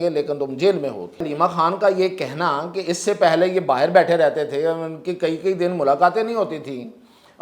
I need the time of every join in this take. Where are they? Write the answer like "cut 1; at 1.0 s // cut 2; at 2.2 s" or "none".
cut 1; at 1.3 s